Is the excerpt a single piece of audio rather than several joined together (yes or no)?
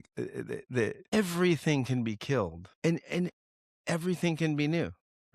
no